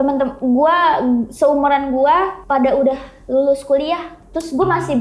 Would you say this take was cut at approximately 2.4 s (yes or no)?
yes